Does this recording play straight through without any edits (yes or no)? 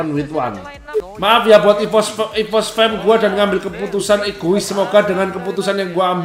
no